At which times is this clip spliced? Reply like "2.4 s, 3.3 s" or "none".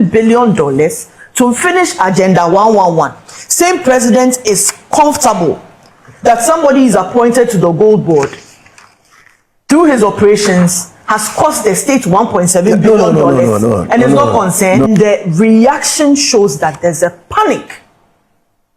14.9 s